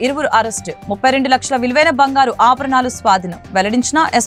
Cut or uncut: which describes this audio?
uncut